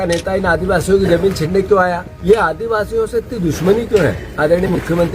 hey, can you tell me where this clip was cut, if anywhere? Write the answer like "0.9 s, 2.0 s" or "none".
2.1 s